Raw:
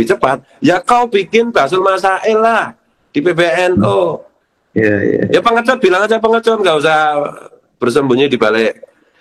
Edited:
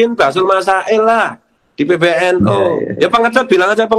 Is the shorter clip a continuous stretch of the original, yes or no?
no